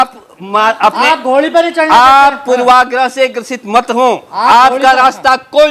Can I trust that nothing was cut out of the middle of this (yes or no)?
yes